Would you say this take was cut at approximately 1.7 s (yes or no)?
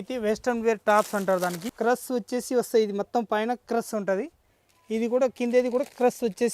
yes